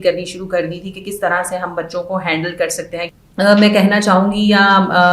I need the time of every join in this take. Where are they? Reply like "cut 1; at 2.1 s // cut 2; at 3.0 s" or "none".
cut 1; at 3.0 s